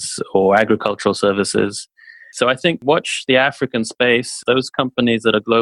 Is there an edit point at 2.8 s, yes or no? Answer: yes